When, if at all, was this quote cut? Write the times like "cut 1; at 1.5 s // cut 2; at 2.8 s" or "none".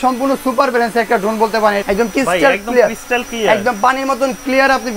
cut 1; at 1.8 s